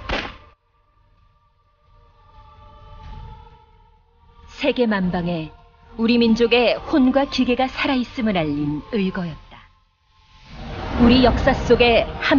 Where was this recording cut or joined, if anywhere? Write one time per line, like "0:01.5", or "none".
0:08.8